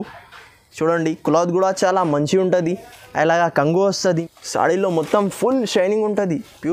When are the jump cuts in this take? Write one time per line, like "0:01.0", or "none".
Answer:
0:04.0